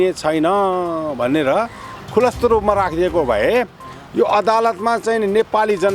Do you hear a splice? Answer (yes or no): no